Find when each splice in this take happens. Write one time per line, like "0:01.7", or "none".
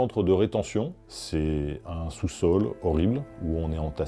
0:01.1